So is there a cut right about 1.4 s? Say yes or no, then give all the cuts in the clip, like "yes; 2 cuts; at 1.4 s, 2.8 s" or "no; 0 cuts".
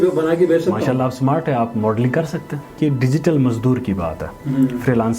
no; 1 cut; at 2.7 s